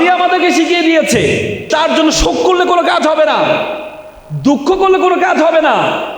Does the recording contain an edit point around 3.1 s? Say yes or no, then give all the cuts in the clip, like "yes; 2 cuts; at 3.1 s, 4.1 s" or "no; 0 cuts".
no; 1 cut; at 1.6 s